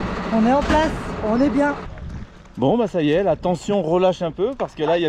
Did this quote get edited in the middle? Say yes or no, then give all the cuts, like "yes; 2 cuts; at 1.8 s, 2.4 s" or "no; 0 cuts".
yes; 1 cut; at 2.0 s